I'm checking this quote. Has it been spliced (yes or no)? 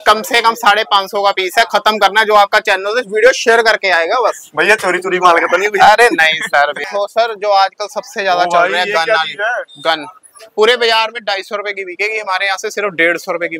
yes